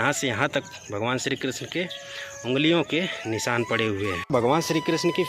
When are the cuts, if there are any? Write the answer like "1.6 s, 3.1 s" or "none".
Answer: 4.3 s